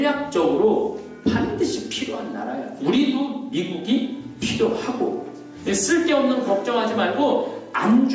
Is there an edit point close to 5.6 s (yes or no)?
yes